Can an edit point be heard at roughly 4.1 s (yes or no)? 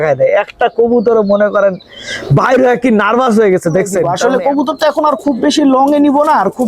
yes